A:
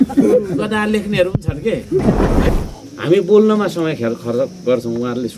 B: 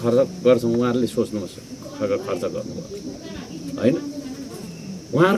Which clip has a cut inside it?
A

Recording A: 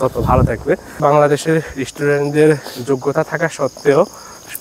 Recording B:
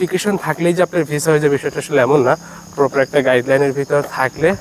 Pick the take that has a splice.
A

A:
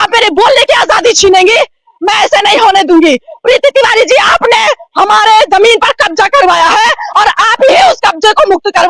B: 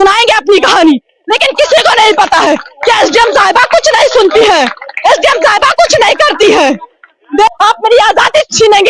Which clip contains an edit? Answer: B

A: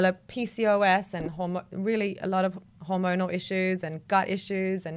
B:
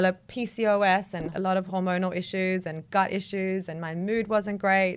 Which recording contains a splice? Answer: B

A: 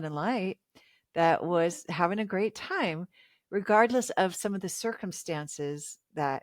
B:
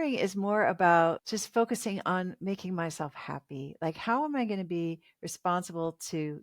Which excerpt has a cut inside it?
B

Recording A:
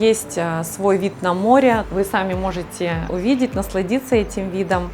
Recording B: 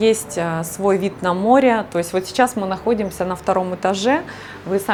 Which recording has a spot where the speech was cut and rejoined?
A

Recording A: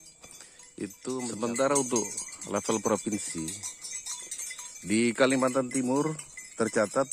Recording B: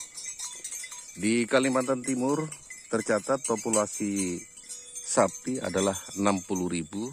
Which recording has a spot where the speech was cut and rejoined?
A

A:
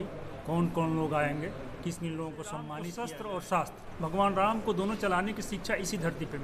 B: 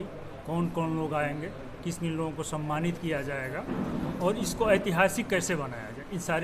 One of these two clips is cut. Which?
A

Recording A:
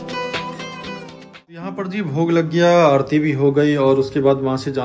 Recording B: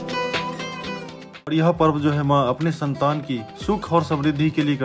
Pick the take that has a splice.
B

